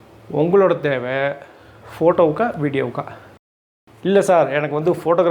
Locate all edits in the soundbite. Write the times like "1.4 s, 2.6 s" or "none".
3.4 s